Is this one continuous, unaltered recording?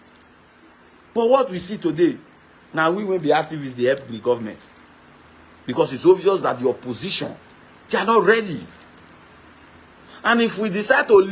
yes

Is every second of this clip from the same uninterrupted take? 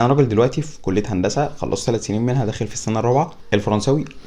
no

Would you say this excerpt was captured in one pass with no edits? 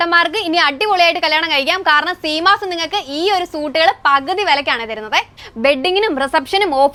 yes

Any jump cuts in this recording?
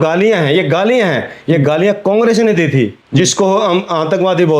yes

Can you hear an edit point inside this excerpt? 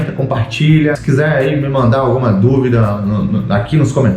yes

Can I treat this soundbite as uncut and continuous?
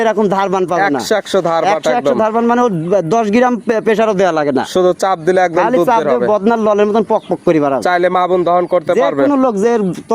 yes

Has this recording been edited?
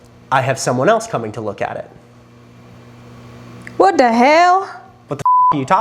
no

